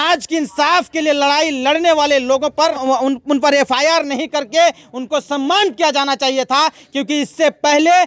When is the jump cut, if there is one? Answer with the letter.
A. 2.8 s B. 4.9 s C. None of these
A